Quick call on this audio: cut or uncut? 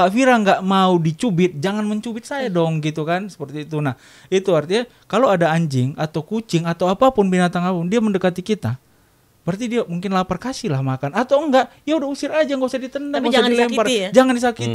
uncut